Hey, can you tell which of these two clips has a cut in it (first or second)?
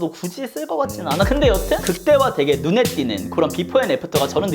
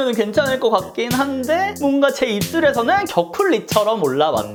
first